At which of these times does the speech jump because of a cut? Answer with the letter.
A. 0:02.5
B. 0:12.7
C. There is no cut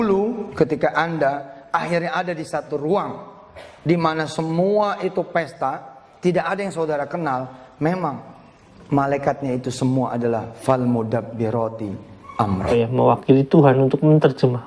B